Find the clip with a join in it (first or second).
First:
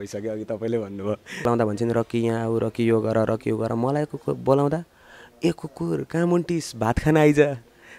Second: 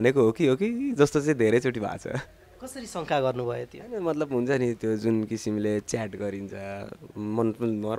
first